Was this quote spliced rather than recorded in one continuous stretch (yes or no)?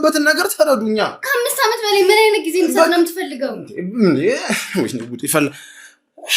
no